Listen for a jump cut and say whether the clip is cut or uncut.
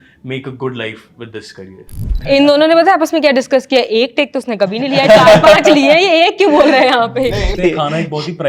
cut